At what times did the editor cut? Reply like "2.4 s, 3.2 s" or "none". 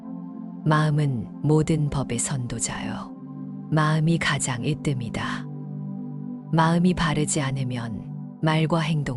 5.1 s, 6.5 s